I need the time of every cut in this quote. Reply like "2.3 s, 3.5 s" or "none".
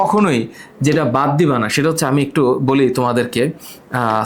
none